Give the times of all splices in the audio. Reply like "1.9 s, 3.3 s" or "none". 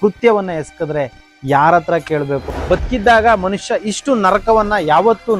2.5 s